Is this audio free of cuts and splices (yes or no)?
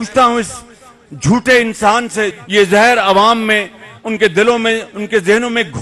no